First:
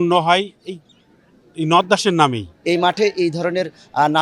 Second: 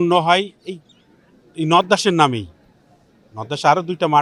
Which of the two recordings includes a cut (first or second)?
first